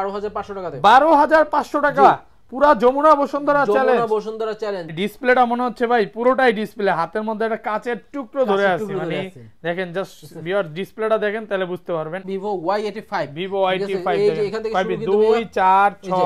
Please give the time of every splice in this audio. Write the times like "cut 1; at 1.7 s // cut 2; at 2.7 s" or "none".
cut 1; at 4.9 s // cut 2; at 12.2 s